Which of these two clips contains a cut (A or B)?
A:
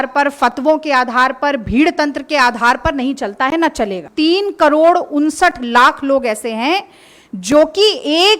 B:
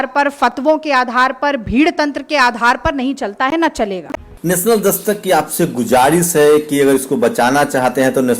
A